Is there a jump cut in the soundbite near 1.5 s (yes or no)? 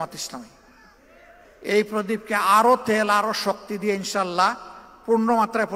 yes